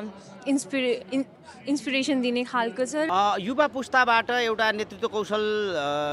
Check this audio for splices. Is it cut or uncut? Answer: cut